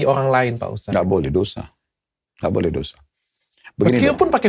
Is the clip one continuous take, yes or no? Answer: yes